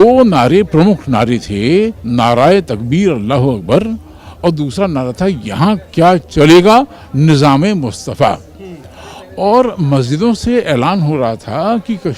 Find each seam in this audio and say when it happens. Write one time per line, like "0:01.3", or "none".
none